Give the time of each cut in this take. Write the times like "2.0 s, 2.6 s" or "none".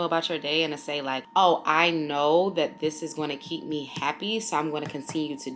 1.2 s